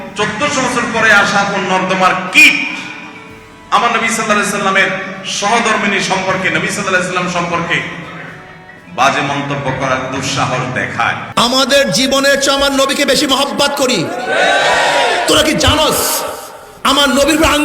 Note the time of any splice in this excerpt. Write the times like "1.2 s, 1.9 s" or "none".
11.2 s